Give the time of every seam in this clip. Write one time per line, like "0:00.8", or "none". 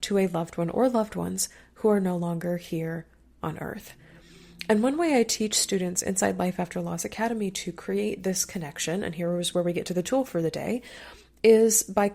none